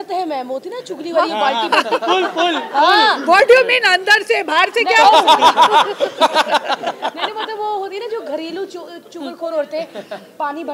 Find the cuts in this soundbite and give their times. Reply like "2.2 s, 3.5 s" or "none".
none